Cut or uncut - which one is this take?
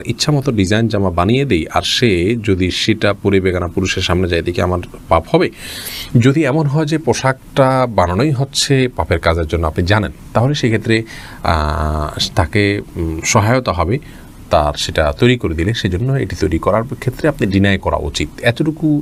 uncut